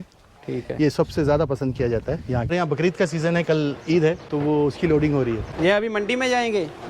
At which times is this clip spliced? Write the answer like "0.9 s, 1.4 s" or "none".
2.5 s, 4.2 s, 5.5 s